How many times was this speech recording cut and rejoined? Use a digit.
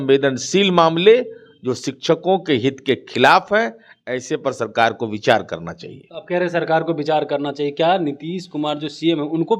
0